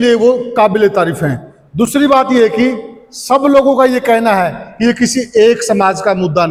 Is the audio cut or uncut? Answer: uncut